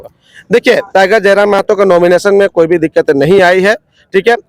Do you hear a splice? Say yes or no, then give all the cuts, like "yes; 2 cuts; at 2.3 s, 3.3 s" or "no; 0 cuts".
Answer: no; 0 cuts